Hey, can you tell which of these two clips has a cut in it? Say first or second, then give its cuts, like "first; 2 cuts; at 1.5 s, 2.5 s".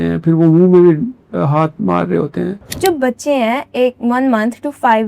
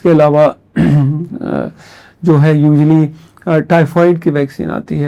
first; 1 cut; at 2.7 s